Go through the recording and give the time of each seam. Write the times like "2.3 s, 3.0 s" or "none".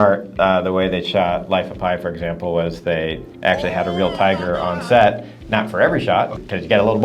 none